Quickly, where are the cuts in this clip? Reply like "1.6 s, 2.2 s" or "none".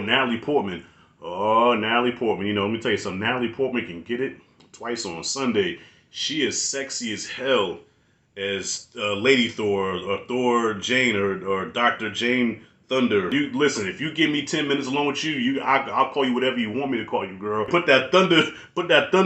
13.3 s, 17.7 s